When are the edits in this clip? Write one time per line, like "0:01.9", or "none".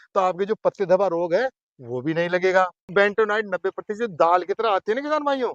0:02.9